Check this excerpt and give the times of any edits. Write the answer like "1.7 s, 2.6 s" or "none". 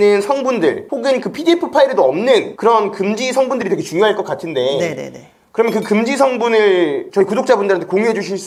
none

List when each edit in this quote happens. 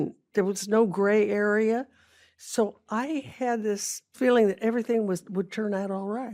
none

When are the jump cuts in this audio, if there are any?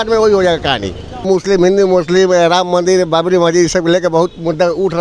1.2 s

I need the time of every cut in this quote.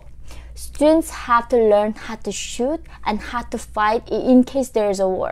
none

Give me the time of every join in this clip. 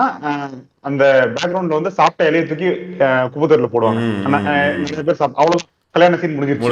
none

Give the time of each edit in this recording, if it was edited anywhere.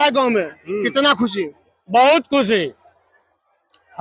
none

